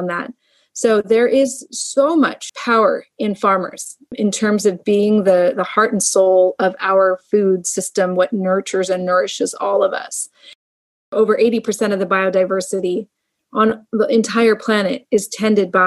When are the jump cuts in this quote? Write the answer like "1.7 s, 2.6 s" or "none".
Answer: 2.5 s, 4.1 s, 10.7 s